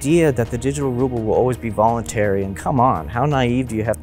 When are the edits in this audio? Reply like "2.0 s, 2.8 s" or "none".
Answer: 2.6 s